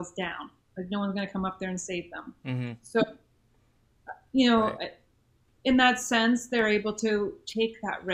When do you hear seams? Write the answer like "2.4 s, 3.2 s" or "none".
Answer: none